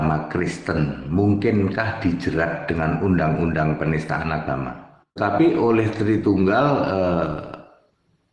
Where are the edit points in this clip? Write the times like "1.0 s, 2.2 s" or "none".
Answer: 5.2 s